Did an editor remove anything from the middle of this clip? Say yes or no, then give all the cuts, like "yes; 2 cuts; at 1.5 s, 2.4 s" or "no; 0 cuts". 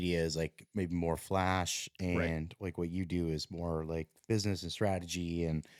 no; 0 cuts